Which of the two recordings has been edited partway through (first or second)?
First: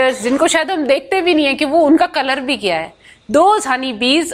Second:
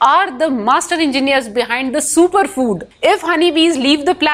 second